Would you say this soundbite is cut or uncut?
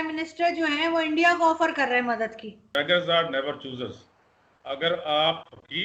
cut